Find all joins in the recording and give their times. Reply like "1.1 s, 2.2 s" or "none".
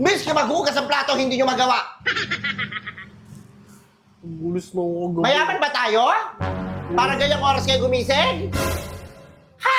none